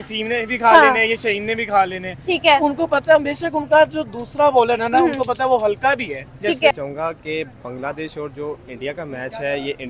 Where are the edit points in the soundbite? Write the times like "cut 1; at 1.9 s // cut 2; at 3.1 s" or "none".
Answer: cut 1; at 6.7 s

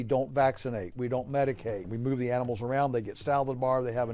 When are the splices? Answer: cut 1; at 1.9 s

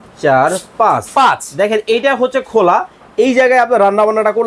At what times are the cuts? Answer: none

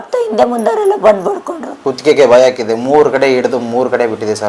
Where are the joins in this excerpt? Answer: cut 1; at 1.9 s

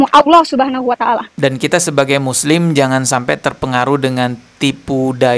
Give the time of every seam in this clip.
cut 1; at 1.3 s

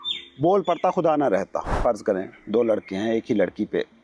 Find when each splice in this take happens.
cut 1; at 1.7 s

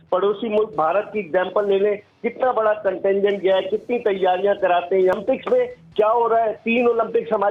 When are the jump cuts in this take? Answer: cut 1; at 5.1 s

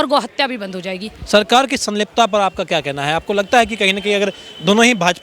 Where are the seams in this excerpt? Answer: none

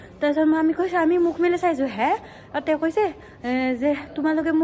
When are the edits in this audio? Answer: none

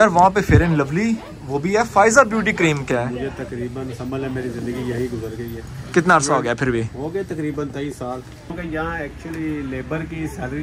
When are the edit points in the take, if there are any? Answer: cut 1; at 2.9 s // cut 2; at 8.5 s

